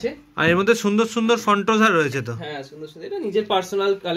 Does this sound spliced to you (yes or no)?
no